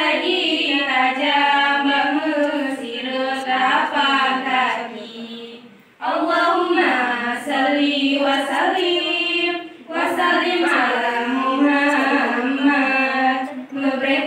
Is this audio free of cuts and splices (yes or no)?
yes